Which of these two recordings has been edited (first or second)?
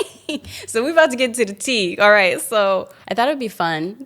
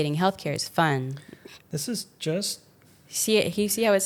first